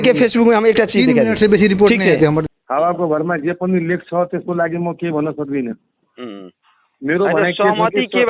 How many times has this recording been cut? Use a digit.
1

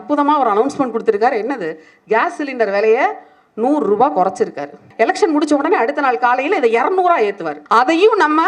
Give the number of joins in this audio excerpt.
2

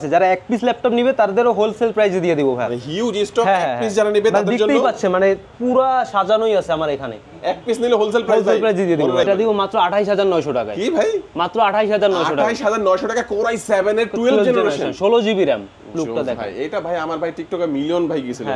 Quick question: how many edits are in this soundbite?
2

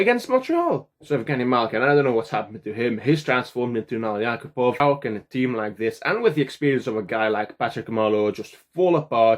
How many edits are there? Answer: 2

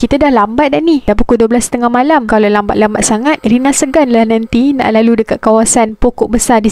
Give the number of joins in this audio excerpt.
0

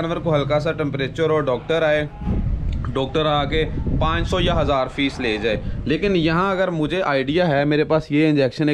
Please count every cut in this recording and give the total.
0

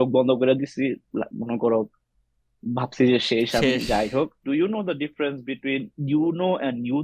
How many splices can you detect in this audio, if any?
1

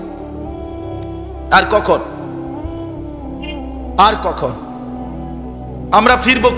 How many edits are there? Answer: 0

